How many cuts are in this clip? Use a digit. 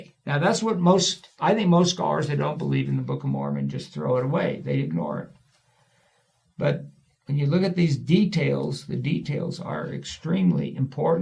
0